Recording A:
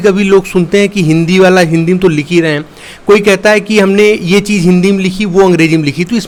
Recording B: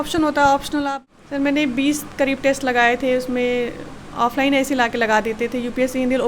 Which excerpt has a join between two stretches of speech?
B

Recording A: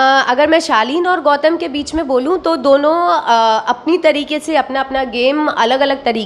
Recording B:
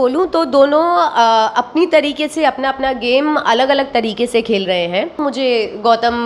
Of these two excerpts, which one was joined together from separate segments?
B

